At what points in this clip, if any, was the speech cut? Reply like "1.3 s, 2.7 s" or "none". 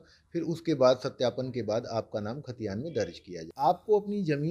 3.5 s